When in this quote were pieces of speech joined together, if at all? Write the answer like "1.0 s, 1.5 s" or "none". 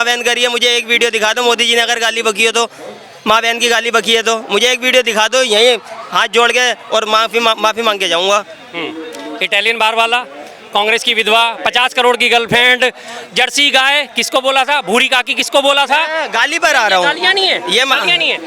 none